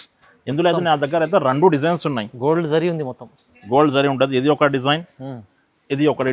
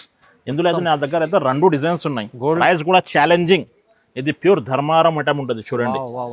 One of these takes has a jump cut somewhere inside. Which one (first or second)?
second